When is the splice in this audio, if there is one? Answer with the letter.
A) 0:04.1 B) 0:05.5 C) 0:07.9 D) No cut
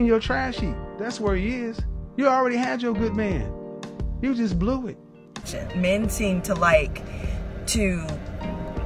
B